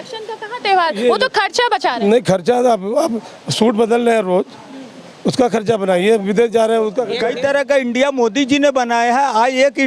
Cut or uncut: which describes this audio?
cut